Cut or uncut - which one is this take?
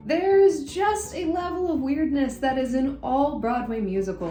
uncut